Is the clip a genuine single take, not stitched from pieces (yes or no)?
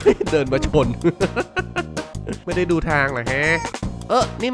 yes